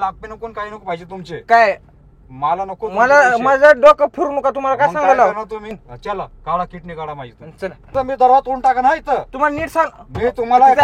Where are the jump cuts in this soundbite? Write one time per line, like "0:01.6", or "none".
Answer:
0:05.8
0:07.9